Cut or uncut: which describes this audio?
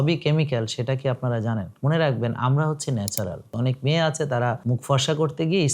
cut